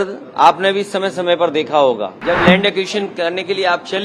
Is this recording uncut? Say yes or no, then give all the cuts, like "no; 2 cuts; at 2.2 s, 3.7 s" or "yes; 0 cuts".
no; 1 cut; at 2.2 s